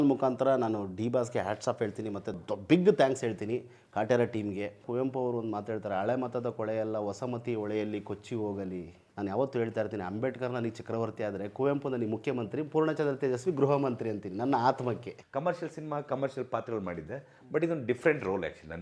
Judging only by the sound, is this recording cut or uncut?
cut